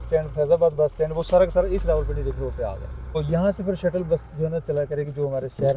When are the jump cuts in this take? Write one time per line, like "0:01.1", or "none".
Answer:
0:03.2